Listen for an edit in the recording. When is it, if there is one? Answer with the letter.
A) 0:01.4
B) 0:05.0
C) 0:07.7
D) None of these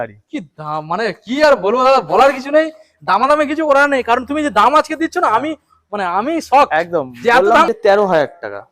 C